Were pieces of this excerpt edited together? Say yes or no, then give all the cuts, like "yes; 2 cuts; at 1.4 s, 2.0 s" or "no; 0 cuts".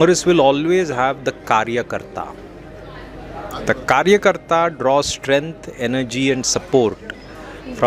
no; 0 cuts